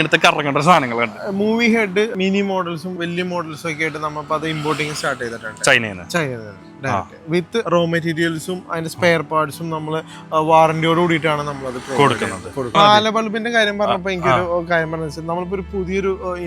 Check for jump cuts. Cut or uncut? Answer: cut